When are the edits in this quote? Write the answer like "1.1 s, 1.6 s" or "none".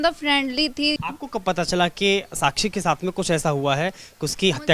1.0 s